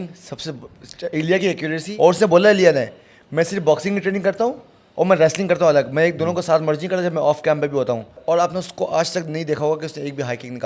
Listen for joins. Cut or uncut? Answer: cut